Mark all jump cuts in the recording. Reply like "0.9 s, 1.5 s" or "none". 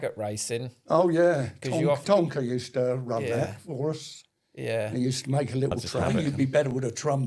6.1 s